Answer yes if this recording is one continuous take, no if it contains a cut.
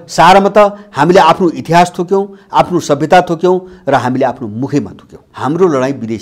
no